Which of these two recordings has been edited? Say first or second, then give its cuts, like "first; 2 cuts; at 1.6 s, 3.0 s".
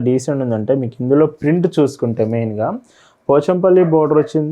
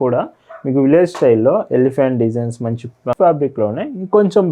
second; 1 cut; at 3.1 s